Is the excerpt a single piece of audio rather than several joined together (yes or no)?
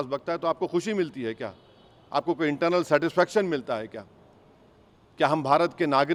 yes